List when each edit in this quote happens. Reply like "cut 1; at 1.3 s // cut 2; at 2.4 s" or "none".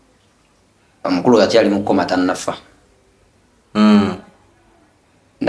none